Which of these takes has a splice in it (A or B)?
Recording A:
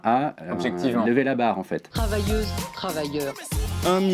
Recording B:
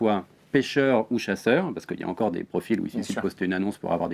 A